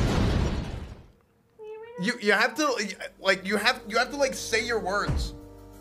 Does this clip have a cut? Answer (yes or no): no